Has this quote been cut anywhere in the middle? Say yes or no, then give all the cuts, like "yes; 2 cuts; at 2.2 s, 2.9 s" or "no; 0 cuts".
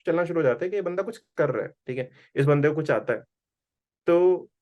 no; 0 cuts